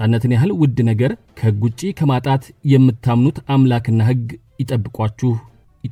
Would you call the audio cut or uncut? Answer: uncut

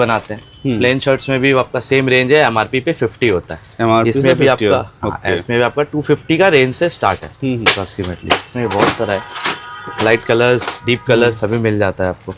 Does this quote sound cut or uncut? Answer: uncut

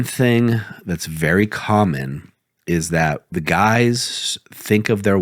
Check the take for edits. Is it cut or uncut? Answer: cut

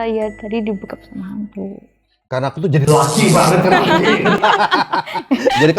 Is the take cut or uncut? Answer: cut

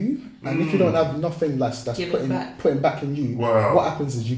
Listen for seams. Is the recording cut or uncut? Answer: uncut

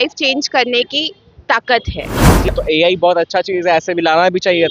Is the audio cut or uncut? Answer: cut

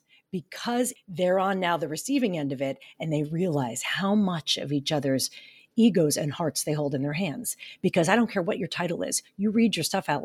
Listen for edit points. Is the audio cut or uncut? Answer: cut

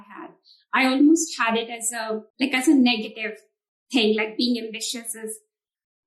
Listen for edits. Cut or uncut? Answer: cut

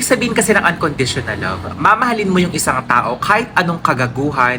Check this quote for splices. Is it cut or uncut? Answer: uncut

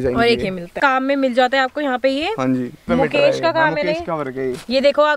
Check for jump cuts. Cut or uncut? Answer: cut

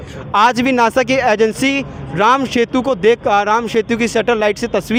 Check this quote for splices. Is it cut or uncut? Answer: uncut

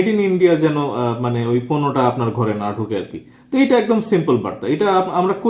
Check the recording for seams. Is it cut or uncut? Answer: uncut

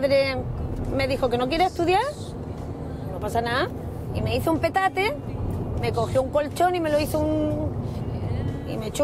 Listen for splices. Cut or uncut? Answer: uncut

